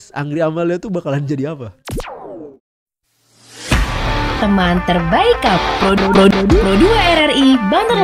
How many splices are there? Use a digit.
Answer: 1